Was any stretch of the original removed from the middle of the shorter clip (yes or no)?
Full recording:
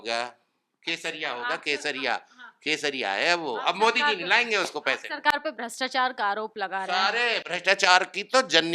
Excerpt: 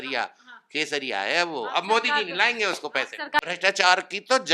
yes